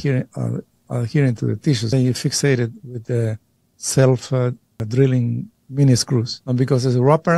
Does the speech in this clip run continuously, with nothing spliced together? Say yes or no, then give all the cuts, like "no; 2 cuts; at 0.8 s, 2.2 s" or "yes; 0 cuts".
no; 3 cuts; at 1.9 s, 4.7 s, 5.5 s